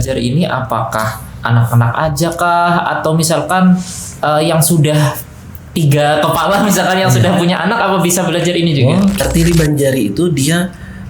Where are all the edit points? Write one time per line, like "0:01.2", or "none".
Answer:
0:09.2

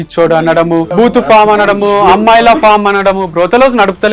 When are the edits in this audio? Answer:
0:00.9

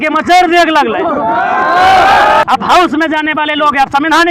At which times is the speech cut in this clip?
0:02.8

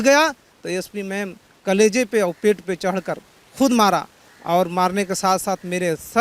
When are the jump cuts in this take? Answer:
none

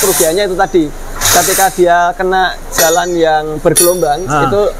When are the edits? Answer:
none

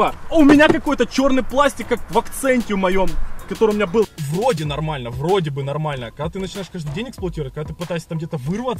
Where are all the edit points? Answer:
0:04.2

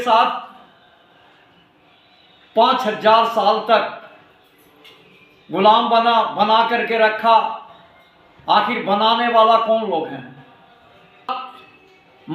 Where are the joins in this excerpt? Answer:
0:11.4

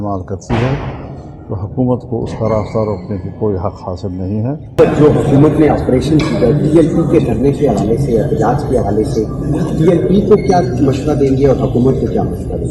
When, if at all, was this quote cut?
0:04.7

